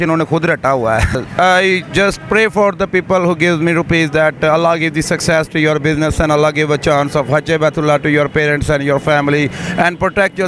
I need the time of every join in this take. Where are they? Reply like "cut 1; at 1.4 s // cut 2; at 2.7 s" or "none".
cut 1; at 1.2 s